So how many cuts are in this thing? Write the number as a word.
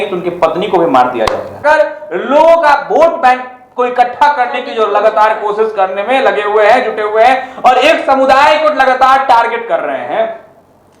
one